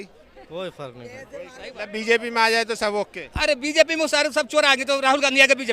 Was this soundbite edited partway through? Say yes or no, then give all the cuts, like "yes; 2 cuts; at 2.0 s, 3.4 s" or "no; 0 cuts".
yes; 1 cut; at 1.7 s